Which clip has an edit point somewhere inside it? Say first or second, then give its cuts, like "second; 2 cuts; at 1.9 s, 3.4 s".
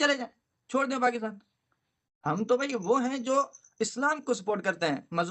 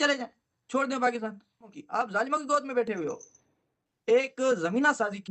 second; 2 cuts; at 1.8 s, 3.9 s